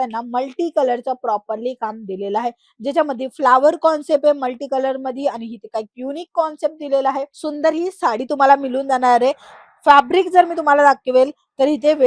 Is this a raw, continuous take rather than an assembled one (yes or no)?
yes